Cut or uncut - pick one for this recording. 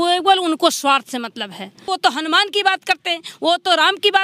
uncut